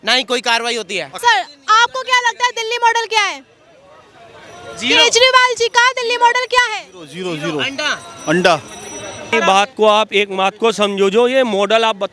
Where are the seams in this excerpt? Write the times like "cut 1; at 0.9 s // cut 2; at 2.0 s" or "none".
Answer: cut 1; at 1.2 s // cut 2; at 9.3 s